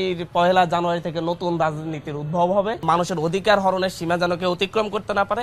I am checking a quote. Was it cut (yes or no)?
yes